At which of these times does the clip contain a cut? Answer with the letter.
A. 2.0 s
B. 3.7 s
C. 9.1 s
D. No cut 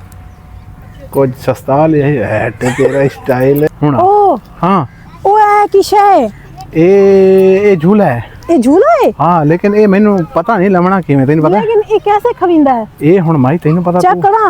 B